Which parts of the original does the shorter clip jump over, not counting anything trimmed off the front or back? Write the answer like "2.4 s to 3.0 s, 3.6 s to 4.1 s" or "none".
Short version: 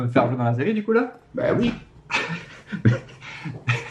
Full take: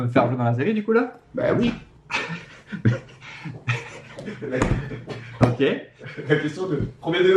none